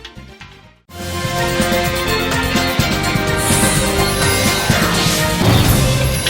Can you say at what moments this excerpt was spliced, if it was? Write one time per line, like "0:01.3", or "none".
0:04.9

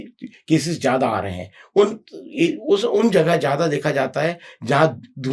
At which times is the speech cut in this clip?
none

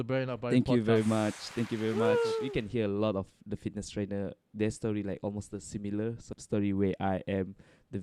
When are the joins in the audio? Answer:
0:02.5
0:06.3

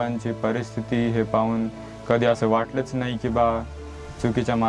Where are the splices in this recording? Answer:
none

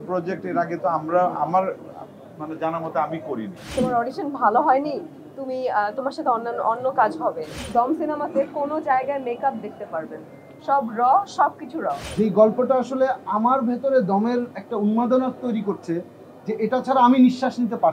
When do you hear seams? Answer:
0:03.7
0:07.6
0:11.9

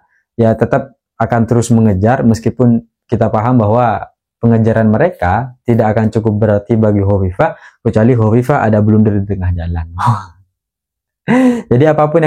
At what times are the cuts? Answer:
none

